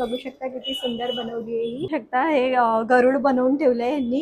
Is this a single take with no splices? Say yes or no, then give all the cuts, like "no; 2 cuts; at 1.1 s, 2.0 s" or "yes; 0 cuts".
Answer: no; 1 cut; at 1.9 s